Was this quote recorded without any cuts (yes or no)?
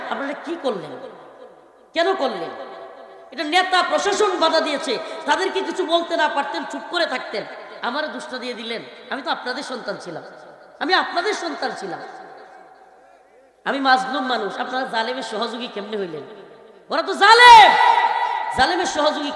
yes